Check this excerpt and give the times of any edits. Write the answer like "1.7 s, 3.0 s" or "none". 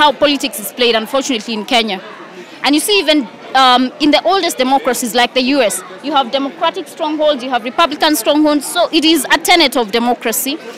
none